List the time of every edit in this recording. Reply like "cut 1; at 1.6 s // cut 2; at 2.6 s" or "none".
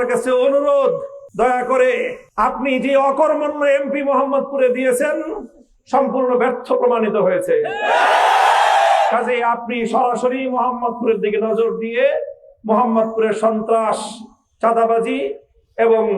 cut 1; at 1.2 s // cut 2; at 2.2 s